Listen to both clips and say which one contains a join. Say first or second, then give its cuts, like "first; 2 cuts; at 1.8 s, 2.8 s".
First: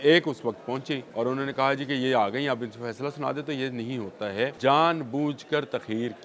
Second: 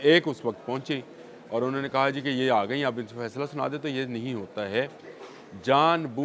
first; 2 cuts; at 1.1 s, 4.5 s